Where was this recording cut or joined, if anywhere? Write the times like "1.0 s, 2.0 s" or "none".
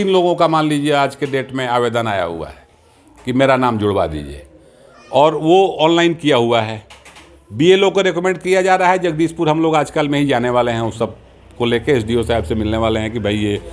none